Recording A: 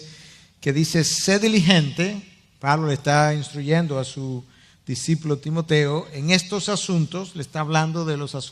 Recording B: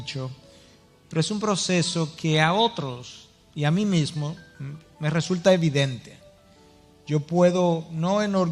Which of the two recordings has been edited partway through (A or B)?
A